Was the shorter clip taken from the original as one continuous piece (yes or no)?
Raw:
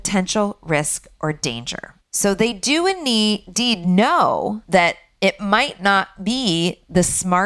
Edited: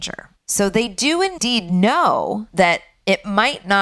no